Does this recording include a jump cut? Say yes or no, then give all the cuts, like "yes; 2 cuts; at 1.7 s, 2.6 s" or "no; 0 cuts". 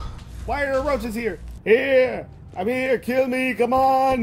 yes; 1 cut; at 1.5 s